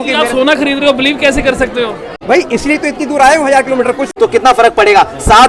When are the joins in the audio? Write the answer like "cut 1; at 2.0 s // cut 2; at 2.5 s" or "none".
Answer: cut 1; at 2.1 s // cut 2; at 4.1 s